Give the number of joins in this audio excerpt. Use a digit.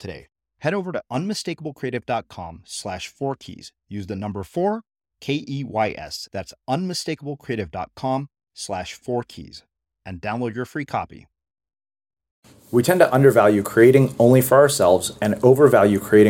1